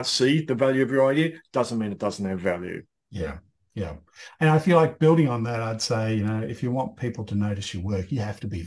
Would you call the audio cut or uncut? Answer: uncut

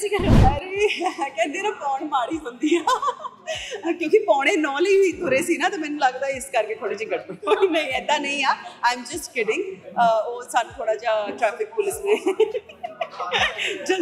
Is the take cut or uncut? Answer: uncut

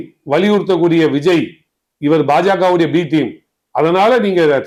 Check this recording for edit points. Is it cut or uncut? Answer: uncut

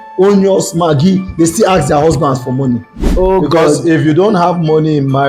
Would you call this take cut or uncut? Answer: cut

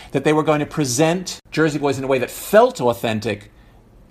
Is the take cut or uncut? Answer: cut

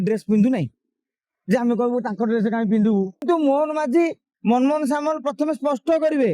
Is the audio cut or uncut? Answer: cut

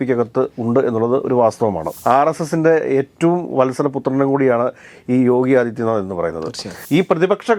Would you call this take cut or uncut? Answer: cut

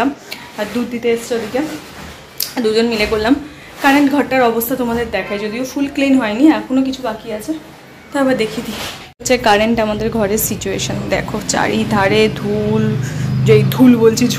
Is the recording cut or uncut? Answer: uncut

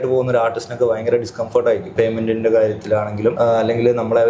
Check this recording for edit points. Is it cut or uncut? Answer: cut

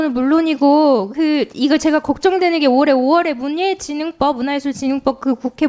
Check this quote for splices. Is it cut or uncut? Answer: uncut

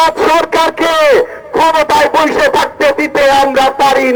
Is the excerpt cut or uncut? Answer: uncut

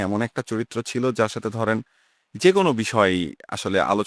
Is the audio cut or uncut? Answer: uncut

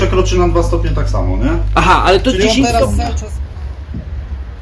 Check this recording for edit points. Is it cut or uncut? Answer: cut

